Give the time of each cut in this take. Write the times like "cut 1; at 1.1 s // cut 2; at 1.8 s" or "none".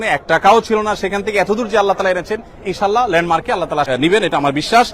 cut 1; at 3.9 s